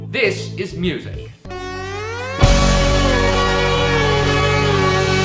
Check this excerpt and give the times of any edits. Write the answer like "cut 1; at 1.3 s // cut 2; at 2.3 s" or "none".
none